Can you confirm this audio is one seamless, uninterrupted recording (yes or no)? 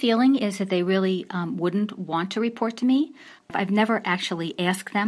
no